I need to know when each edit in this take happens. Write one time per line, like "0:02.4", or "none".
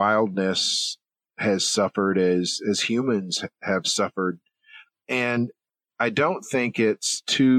none